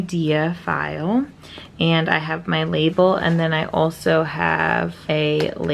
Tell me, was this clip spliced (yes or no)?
no